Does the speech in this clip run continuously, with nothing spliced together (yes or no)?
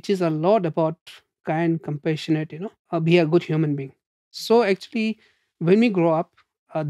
no